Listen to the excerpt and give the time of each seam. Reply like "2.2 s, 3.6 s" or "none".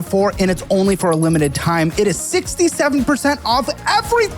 none